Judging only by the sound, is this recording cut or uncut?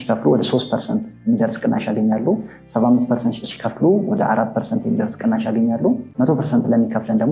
cut